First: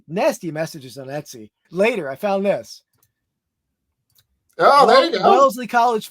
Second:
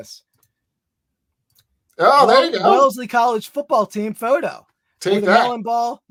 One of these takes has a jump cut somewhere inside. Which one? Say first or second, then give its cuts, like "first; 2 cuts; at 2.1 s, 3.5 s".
first; 1 cut; at 1.6 s